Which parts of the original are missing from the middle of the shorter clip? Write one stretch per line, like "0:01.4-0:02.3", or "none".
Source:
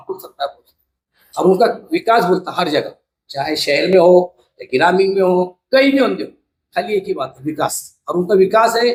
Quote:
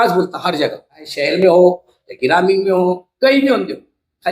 0:03.2-0:03.6